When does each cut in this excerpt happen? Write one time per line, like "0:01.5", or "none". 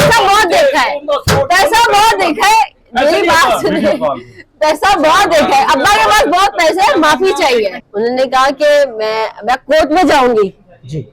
0:07.8